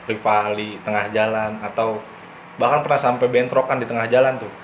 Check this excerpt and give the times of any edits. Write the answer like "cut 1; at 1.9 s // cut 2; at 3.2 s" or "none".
none